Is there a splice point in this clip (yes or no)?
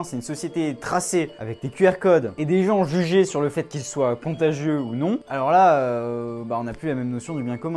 no